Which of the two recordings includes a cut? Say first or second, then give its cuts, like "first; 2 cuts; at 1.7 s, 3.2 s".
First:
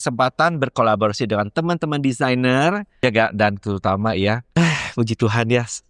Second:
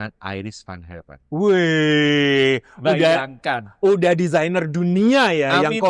first; 2 cuts; at 2.9 s, 4.4 s